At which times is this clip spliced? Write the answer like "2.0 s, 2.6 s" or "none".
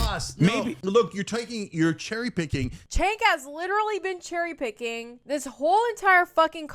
2.8 s